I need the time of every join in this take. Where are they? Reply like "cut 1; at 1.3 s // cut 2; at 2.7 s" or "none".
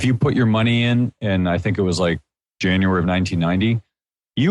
cut 1; at 2.5 s